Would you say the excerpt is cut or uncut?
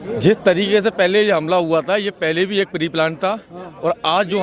uncut